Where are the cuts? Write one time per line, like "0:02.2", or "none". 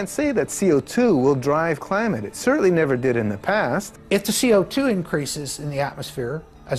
0:03.9